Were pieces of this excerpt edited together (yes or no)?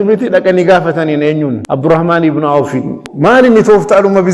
yes